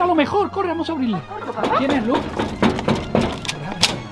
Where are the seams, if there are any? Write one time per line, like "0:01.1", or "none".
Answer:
0:01.5